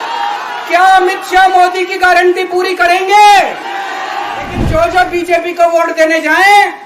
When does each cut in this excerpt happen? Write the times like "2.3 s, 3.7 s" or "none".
4.6 s